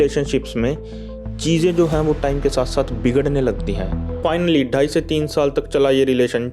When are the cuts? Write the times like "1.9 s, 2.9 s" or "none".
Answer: 4.1 s